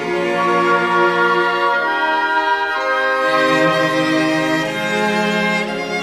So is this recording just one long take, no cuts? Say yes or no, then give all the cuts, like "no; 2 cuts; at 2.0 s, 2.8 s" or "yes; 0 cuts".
no; 1 cut; at 5.0 s